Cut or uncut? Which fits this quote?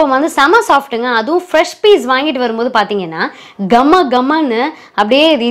uncut